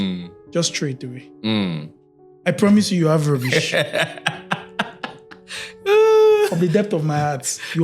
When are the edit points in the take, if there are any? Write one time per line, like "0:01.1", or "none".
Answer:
none